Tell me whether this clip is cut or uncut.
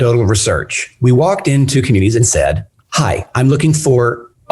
cut